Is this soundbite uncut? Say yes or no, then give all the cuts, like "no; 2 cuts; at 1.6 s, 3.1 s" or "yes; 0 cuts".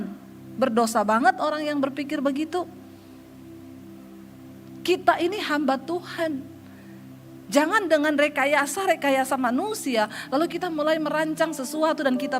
yes; 0 cuts